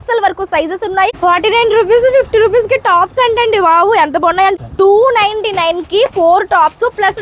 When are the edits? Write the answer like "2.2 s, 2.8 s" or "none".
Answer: 1.1 s, 4.5 s